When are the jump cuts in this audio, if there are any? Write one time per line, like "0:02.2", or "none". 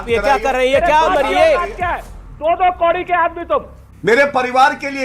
0:02.1
0:03.8